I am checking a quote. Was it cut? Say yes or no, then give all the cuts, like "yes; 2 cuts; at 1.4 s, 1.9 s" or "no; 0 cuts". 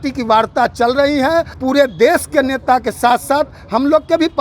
yes; 1 cut; at 1.5 s